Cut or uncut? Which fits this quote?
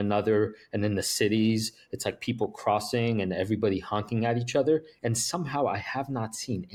uncut